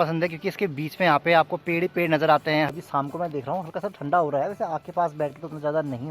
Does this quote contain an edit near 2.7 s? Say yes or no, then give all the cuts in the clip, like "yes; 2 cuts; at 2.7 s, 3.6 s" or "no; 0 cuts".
yes; 1 cut; at 2.7 s